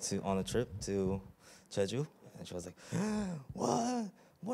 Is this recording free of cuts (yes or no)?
yes